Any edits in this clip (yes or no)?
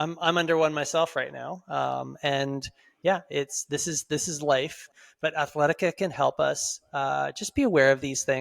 yes